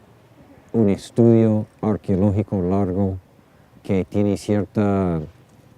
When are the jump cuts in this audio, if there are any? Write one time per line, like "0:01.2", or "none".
0:04.1